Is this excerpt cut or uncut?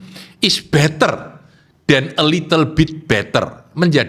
uncut